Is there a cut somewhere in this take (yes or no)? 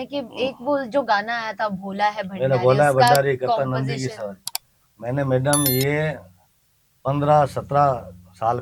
no